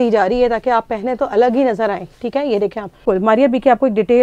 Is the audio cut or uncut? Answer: cut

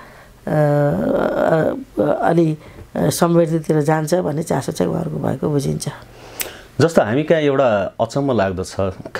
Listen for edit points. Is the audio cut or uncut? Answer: uncut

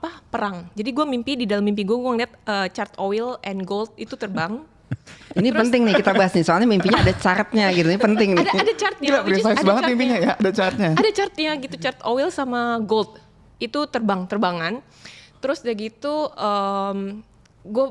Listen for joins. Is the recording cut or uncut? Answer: uncut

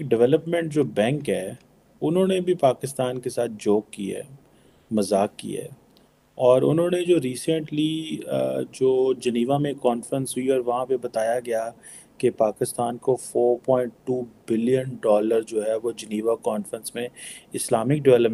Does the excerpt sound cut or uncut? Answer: uncut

